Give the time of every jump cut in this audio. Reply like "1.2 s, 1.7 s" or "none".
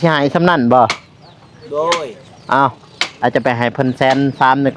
none

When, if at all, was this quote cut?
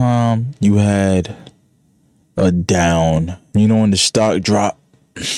3.4 s

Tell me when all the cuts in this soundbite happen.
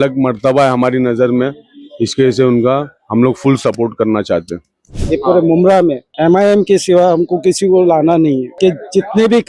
4.9 s, 6.1 s, 8.5 s

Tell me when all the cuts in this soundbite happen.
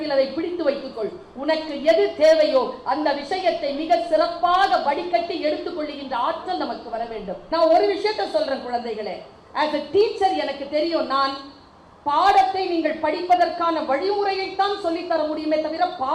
7.4 s

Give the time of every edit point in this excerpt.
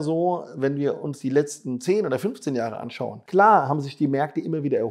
3.2 s

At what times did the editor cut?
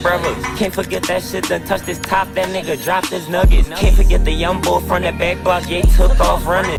none

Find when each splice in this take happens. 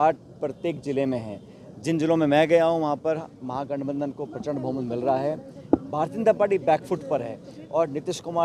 none

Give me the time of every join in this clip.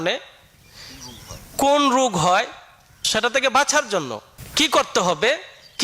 3.0 s, 4.1 s

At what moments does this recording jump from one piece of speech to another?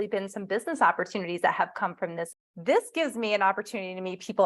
2.4 s

